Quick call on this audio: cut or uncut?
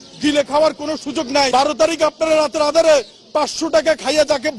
cut